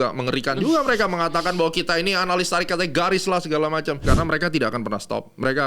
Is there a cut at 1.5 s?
no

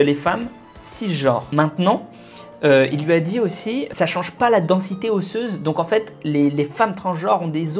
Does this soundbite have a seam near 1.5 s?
yes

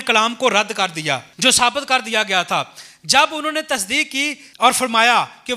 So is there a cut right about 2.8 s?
no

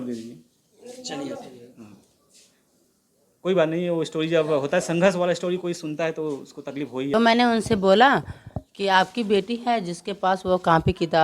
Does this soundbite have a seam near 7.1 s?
yes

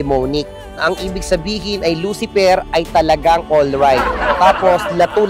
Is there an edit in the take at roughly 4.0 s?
no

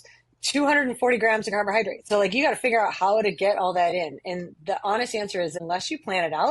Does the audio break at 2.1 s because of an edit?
yes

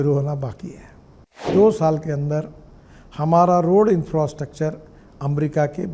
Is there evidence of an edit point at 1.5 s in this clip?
yes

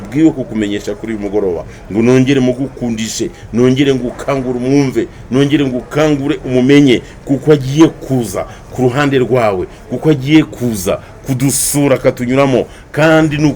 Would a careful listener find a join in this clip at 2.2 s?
no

